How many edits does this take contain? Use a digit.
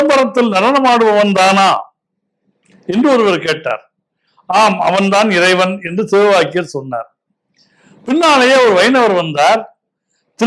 0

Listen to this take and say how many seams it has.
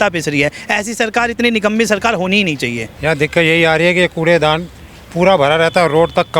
1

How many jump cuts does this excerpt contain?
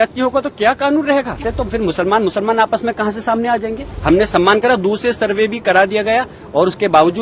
2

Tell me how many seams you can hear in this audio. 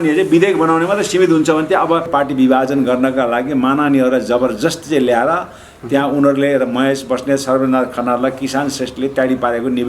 1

